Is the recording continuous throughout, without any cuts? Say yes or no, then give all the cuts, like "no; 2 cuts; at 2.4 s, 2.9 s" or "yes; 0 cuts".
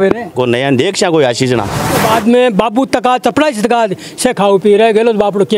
no; 1 cut; at 2.0 s